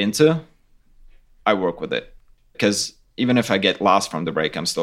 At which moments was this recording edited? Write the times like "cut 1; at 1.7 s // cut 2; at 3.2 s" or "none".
cut 1; at 2.5 s

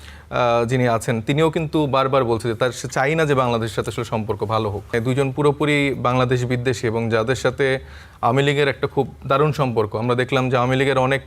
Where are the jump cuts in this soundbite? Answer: cut 1; at 4.9 s

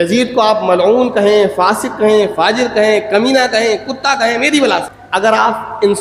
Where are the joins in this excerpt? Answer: cut 1; at 5.0 s

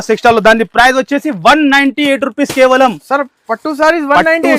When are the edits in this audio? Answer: none

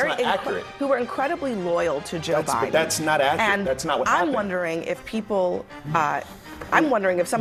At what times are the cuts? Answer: none

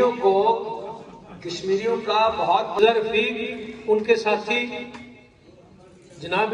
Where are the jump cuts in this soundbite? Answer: cut 1; at 2.8 s

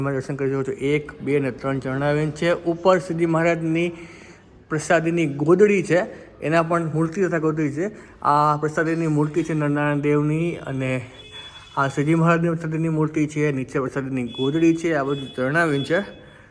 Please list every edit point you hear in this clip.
none

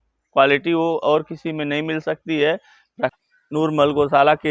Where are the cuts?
cut 1; at 3.2 s

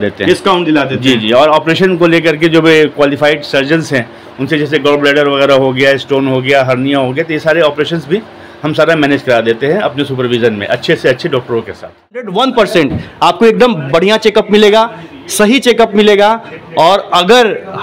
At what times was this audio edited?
cut 1; at 12.3 s

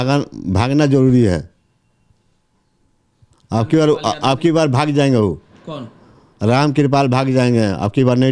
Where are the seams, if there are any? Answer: none

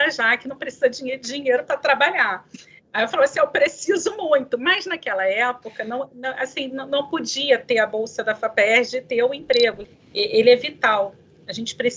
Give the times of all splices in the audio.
cut 1; at 9.8 s

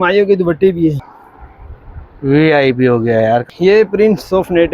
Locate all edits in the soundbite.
cut 1; at 1.0 s // cut 2; at 3.4 s

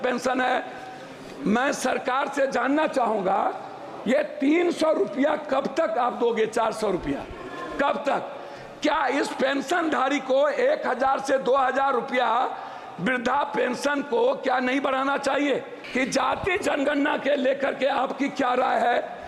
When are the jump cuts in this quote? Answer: cut 1; at 15.8 s

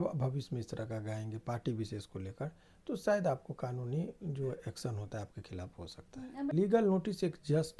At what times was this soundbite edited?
cut 1; at 6.5 s

